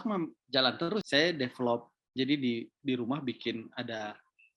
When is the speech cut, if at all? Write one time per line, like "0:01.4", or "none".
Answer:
0:01.0